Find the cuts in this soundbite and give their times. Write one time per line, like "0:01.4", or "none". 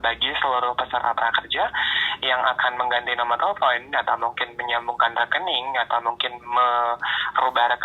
none